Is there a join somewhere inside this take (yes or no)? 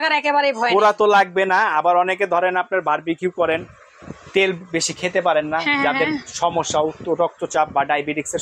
no